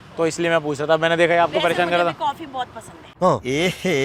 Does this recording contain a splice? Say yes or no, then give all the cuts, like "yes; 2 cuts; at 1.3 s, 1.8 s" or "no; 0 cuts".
no; 0 cuts